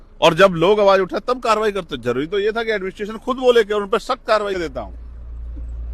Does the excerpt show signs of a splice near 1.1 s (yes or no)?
no